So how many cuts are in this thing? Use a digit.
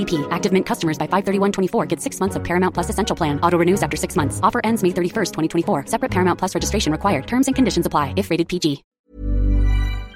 1